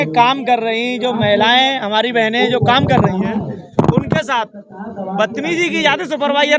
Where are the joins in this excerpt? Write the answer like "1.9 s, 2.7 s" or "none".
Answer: none